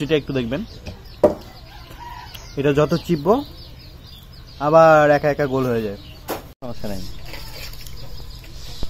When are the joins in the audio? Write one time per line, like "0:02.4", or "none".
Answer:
0:06.5